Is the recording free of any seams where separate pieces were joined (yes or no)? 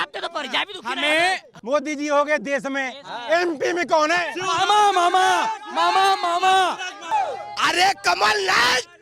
no